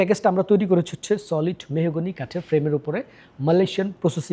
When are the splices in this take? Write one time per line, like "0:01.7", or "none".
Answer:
none